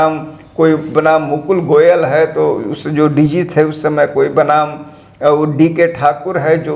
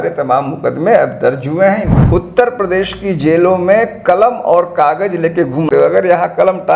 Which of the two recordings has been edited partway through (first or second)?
second